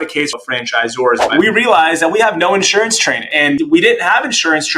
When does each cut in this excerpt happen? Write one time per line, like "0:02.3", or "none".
0:01.3
0:03.6